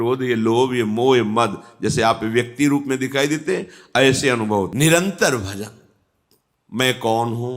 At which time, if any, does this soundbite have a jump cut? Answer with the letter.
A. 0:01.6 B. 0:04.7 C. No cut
B